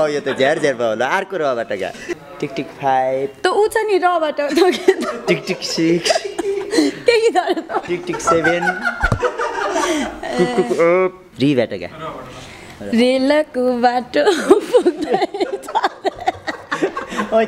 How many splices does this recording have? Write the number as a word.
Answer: two